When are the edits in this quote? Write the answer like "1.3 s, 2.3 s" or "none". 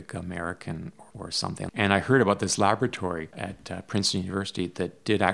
1.7 s, 3.4 s